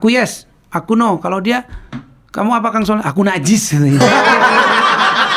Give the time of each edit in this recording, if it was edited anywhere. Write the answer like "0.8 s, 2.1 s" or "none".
none